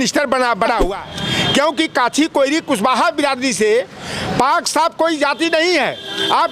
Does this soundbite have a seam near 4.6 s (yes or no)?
no